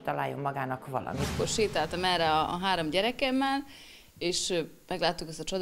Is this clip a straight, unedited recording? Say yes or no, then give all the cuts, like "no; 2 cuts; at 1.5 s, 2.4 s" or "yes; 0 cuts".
no; 1 cut; at 1.3 s